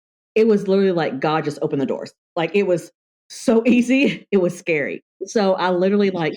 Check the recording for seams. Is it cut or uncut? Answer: cut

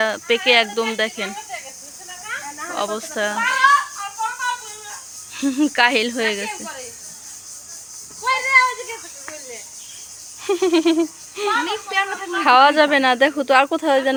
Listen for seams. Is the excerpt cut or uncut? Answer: uncut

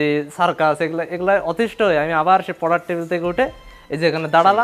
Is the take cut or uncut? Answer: uncut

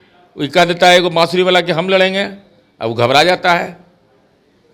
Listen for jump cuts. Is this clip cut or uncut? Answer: uncut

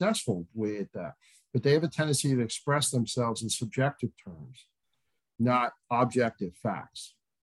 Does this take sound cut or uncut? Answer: uncut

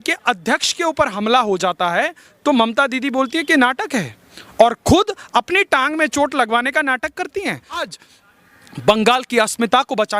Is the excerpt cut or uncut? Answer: cut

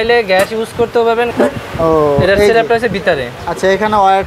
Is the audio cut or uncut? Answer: cut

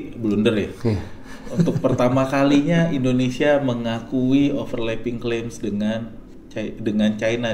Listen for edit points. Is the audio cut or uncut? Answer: uncut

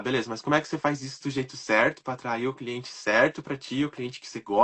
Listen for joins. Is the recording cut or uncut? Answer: uncut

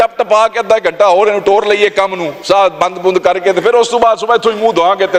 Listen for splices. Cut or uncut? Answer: uncut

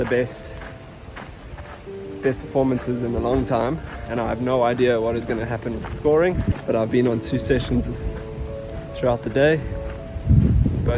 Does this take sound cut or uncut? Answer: cut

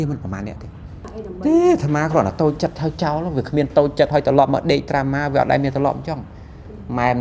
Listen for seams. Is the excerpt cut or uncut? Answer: cut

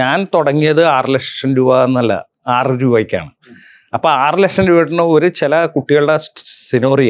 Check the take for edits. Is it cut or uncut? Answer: uncut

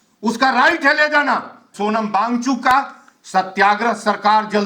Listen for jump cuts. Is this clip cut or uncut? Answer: cut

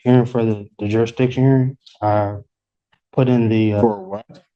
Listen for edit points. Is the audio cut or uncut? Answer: uncut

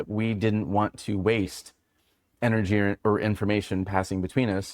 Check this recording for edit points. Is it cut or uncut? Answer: cut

